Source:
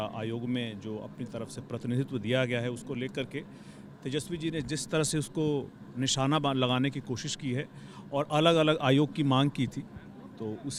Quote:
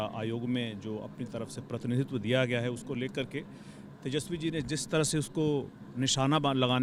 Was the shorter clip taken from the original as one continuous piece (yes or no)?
yes